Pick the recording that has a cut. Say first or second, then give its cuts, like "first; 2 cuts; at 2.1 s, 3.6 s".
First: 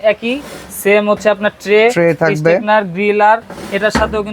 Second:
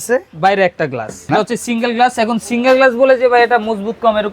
second; 1 cut; at 1.3 s